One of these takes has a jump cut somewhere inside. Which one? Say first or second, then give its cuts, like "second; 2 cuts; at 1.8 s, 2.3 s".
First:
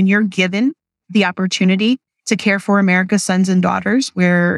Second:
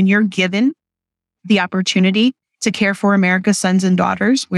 first; 1 cut; at 0.9 s